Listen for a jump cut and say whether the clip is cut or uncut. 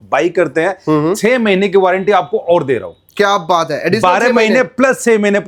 uncut